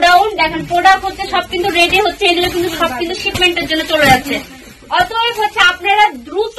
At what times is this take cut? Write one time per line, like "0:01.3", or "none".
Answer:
none